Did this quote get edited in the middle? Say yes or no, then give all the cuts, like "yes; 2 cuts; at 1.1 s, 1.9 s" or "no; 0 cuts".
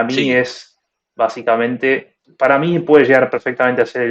yes; 1 cut; at 2.2 s